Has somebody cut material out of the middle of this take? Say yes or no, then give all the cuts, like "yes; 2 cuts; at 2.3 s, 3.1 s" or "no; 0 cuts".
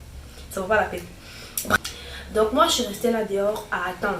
yes; 1 cut; at 1.8 s